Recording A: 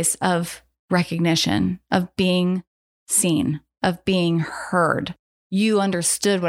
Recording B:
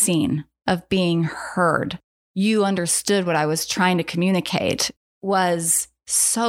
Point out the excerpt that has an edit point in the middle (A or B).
B